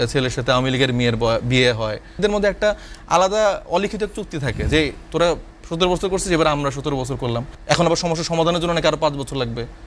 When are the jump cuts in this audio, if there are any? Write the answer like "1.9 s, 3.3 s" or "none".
2.2 s, 7.5 s